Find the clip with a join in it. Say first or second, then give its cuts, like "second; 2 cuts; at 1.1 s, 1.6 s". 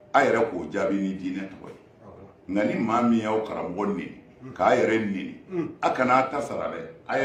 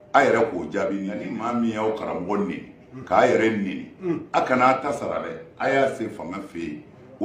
second; 1 cut; at 1.2 s